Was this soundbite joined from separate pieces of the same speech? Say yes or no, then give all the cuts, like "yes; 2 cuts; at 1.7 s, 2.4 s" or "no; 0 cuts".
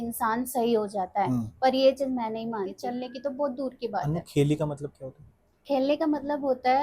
yes; 1 cut; at 2.8 s